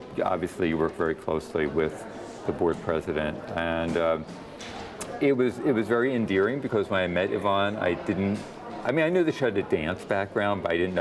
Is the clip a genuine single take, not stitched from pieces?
yes; 0 cuts

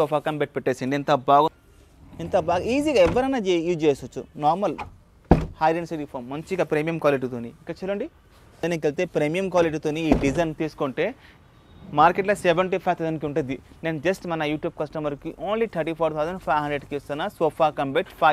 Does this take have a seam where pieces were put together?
yes; 2 cuts; at 1.5 s, 8.6 s

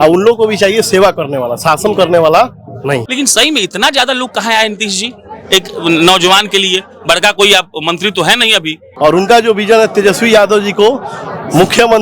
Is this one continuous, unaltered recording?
no; 2 cuts; at 3.1 s, 8.9 s

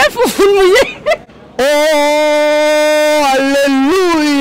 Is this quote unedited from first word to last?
yes; 0 cuts

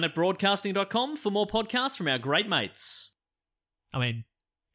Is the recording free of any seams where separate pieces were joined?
yes; 0 cuts

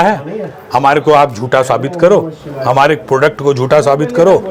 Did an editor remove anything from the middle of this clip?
no; 0 cuts

